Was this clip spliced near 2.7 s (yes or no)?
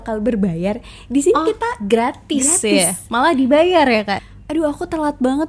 no